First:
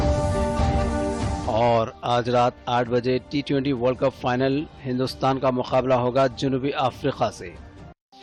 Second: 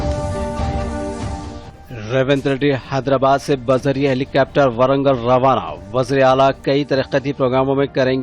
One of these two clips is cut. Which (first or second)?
second